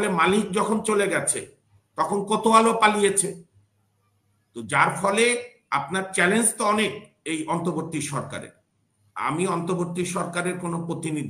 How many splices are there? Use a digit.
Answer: 0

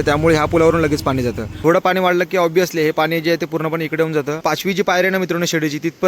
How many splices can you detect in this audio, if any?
2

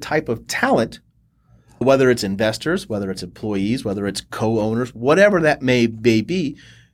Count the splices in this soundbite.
1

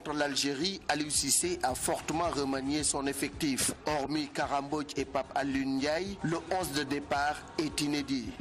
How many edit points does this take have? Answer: 1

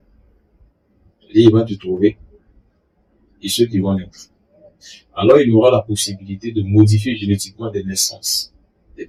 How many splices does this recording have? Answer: 0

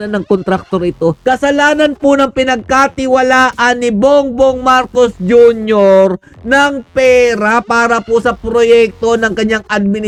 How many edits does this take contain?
0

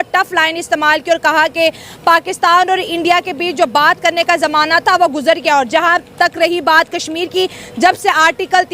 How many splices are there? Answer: 0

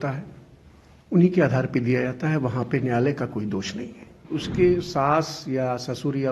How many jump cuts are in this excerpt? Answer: 1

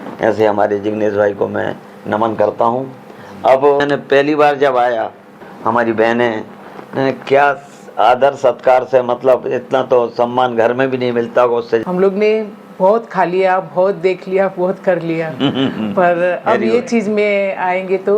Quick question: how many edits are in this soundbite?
3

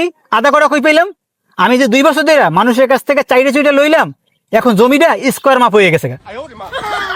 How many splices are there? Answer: 0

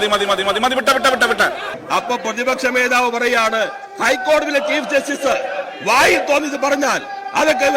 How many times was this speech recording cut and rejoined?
1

